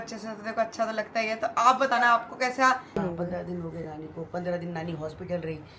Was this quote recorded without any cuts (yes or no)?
no